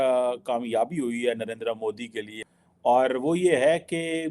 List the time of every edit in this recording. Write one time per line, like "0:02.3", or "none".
0:02.3